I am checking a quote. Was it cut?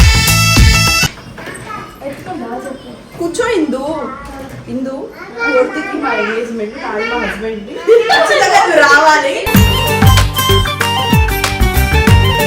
yes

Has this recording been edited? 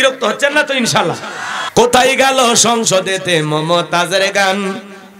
yes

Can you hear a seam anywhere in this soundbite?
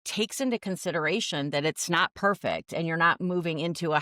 no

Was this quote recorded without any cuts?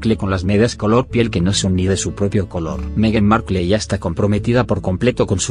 no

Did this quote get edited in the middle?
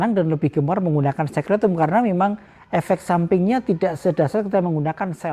no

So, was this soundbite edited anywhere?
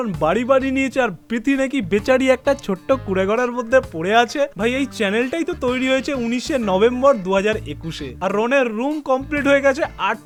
no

